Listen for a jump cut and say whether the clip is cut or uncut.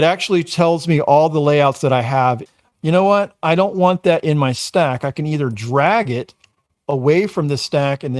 cut